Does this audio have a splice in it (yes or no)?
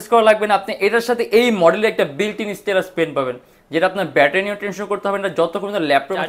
no